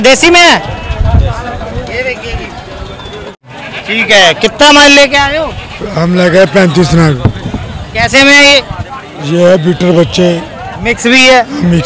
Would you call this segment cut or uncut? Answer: cut